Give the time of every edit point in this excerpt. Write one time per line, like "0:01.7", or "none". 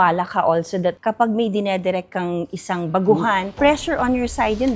0:00.9